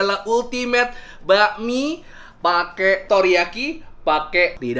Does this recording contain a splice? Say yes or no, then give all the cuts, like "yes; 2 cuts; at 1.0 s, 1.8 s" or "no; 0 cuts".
no; 0 cuts